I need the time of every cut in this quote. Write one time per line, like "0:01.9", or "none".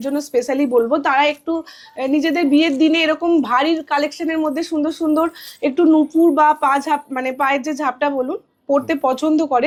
none